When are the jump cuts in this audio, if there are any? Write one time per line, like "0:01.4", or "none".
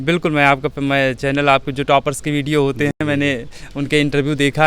none